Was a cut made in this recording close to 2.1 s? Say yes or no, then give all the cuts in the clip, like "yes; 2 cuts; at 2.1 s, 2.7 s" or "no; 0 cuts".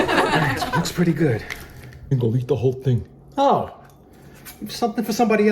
yes; 1 cut; at 2.1 s